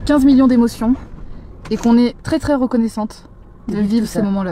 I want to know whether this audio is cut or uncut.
uncut